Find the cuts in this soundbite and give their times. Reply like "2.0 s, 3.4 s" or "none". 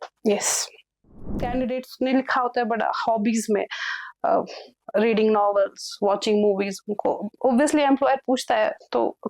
1.2 s